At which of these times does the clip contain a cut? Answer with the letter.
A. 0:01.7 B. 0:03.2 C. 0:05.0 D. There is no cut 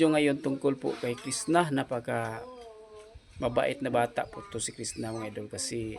D